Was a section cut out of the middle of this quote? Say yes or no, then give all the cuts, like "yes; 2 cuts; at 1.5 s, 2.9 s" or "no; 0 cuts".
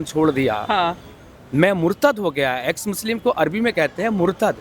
no; 0 cuts